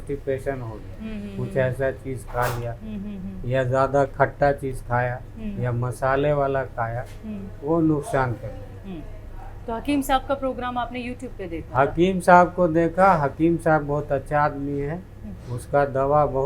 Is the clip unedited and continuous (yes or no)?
yes